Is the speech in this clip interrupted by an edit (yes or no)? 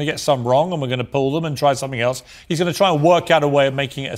no